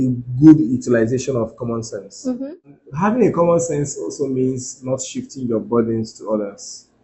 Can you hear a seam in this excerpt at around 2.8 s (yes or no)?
yes